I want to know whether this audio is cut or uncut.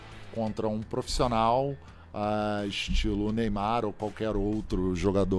uncut